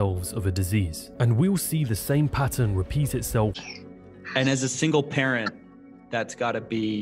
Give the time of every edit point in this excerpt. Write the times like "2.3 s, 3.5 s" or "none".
3.7 s

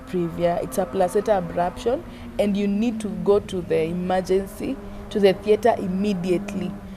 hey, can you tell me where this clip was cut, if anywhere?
none

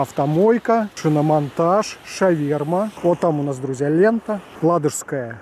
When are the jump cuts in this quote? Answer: 0.9 s, 2.9 s

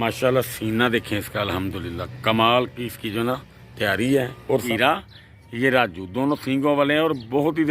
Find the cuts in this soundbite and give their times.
4.6 s

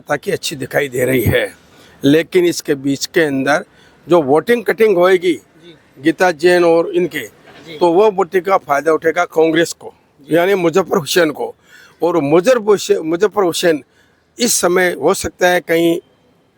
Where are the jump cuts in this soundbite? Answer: none

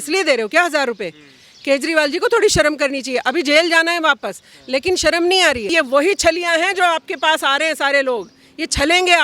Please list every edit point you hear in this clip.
5.7 s

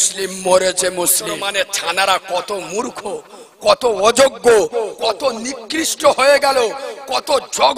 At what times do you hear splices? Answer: 1.3 s

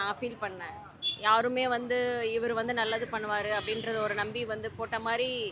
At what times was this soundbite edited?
none

